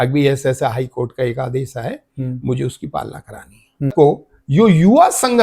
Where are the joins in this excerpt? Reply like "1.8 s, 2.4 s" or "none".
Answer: 3.9 s